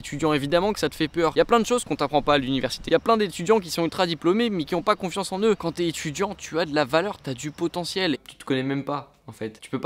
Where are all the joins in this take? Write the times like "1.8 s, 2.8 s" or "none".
1.3 s, 2.8 s, 5.6 s, 8.2 s